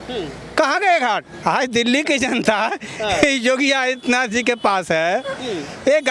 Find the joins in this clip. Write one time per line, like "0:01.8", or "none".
0:01.3